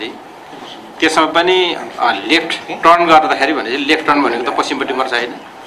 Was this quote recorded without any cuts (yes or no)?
yes